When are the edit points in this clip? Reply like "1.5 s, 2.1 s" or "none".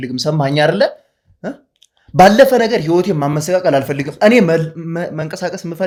none